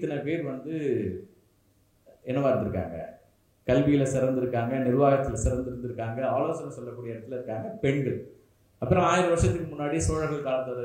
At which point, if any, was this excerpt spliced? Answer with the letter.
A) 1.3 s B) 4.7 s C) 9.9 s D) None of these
D